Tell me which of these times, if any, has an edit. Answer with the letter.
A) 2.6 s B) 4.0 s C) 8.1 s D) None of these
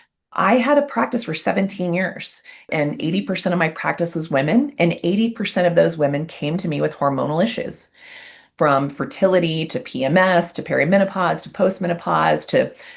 A